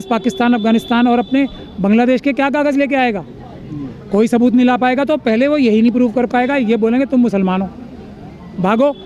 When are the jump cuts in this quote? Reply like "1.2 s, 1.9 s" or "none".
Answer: none